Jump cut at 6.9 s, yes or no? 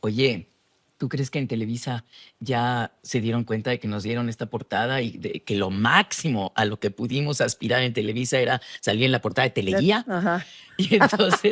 no